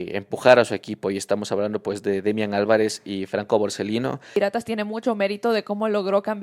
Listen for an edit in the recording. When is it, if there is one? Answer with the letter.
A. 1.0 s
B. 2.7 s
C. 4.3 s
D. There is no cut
C